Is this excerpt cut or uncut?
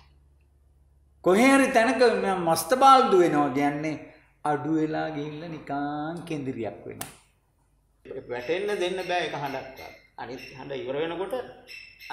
cut